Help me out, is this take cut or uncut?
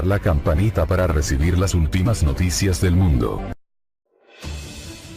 cut